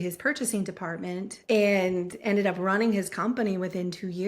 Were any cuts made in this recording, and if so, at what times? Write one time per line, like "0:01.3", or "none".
0:01.3

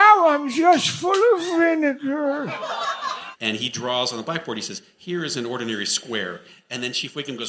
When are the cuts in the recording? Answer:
0:03.3

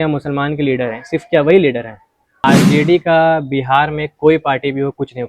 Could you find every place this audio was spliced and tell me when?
0:02.4

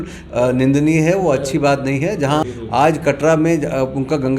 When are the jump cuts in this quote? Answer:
0:02.4

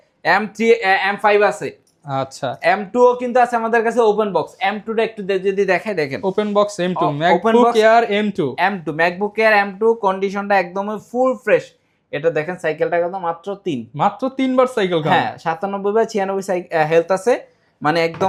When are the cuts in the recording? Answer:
none

